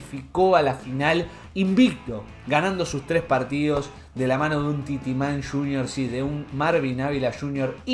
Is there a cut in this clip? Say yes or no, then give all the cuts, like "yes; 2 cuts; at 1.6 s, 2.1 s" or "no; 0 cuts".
no; 0 cuts